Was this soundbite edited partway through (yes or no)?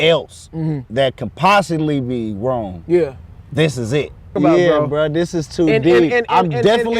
yes